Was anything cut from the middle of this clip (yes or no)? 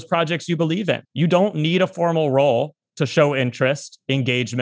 yes